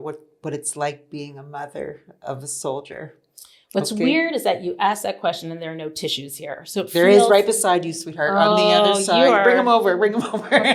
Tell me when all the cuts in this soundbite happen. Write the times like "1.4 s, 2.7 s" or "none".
none